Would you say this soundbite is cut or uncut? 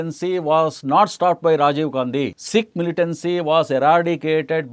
cut